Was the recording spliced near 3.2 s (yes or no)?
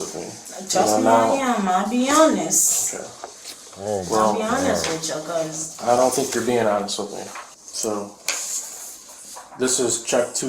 no